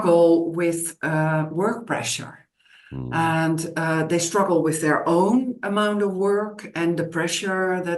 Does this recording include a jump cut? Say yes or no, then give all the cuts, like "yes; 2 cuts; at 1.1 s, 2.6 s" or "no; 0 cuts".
no; 0 cuts